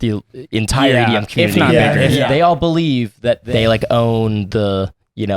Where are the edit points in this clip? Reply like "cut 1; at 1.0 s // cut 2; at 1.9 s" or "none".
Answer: cut 1; at 2.2 s // cut 2; at 3.4 s